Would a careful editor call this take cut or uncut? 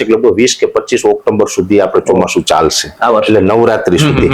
uncut